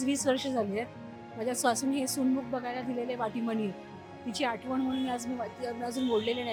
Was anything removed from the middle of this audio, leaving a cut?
no; 0 cuts

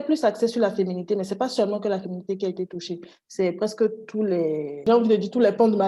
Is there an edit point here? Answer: yes; 1 cut; at 4.8 s

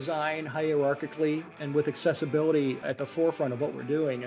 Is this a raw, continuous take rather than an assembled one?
no; 2 cuts; at 1.5 s, 2.8 s

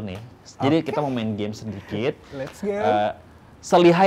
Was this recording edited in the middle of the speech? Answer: no; 0 cuts

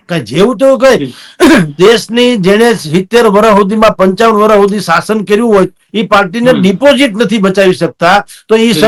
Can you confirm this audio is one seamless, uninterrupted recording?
yes; 0 cuts

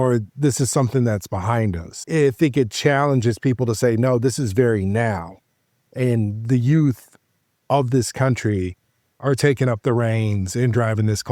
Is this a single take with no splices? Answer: yes; 0 cuts

